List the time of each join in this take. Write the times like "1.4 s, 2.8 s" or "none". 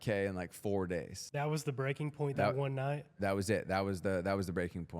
1.2 s